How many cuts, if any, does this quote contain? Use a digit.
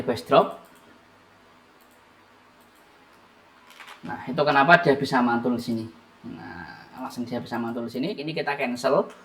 1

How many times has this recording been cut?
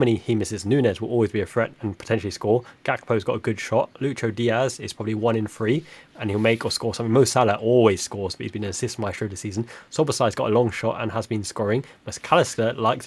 0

